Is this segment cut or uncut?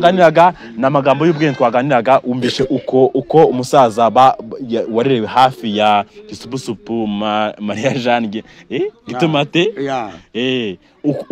uncut